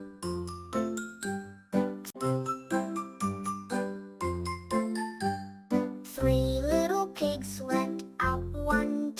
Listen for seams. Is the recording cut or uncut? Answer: uncut